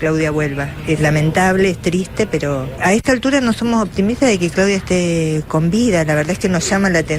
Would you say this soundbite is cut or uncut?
cut